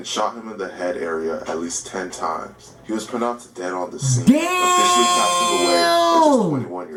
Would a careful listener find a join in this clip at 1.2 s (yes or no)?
no